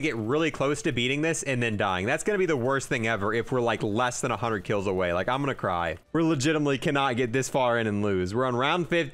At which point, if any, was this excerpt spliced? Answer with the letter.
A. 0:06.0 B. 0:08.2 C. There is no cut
A